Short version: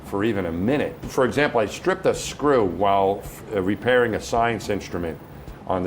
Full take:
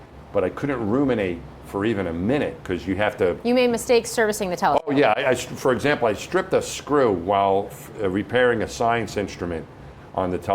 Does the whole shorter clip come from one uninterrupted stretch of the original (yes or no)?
no